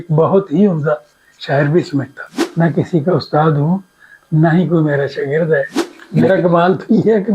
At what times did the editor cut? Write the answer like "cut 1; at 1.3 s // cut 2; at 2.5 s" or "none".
cut 1; at 2.2 s // cut 2; at 5.8 s